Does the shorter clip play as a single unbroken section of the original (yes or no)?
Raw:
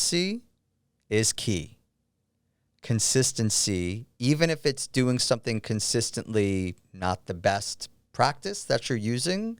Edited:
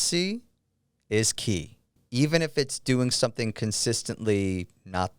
no